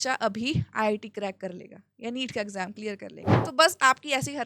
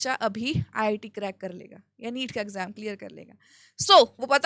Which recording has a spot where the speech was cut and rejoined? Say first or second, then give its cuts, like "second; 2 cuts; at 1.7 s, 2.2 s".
first; 1 cut; at 3.4 s